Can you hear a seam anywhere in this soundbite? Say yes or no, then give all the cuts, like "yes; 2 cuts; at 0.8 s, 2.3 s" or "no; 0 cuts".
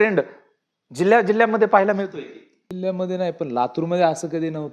yes; 1 cut; at 2.6 s